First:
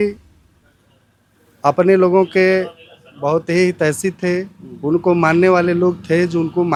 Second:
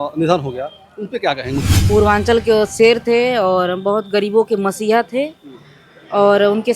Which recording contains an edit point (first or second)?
second